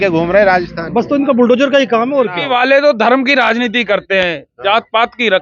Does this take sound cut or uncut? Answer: cut